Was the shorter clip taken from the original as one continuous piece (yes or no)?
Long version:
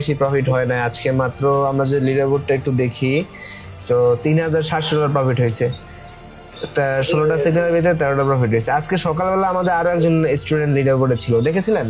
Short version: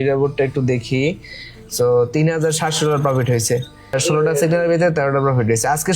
no